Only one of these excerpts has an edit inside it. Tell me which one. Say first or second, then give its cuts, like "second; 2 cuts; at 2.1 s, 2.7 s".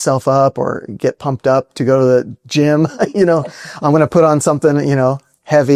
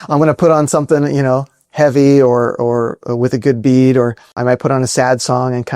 second; 1 cut; at 4.3 s